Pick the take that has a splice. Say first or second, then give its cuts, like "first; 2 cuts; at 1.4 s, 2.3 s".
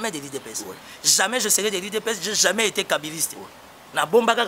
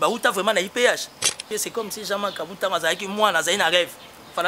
second; 1 cut; at 1.4 s